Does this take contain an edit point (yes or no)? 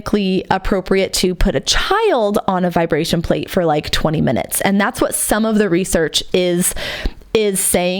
no